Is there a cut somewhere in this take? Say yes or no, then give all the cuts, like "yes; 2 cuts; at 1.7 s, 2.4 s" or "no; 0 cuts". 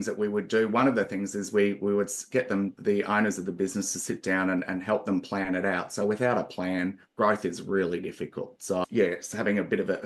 no; 0 cuts